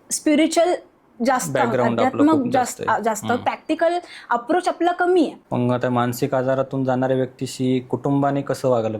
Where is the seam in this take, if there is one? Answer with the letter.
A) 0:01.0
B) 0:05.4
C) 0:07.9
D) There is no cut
B